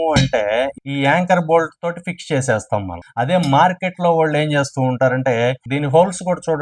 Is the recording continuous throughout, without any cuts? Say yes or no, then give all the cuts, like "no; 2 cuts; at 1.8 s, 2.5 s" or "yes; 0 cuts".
no; 2 cuts; at 3.0 s, 5.6 s